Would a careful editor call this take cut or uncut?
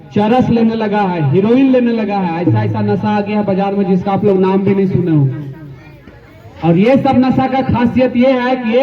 uncut